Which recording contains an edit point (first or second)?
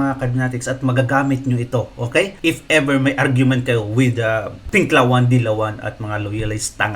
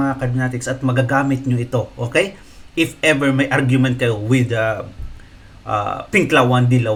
first